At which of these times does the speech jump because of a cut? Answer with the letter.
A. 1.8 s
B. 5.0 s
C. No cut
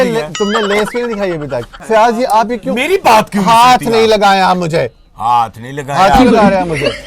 A